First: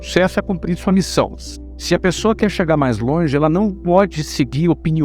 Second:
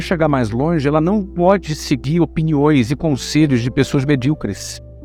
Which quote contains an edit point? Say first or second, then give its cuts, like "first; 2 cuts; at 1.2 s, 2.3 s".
first; 1 cut; at 1.4 s